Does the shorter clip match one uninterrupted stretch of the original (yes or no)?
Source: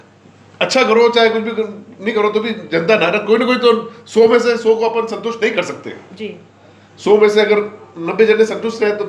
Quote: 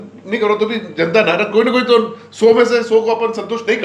yes